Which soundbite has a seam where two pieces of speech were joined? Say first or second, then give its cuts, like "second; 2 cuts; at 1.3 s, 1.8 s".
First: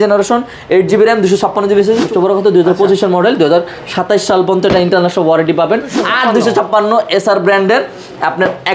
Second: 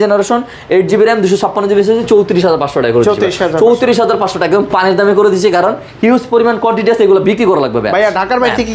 first; 2 cuts; at 2.0 s, 6.0 s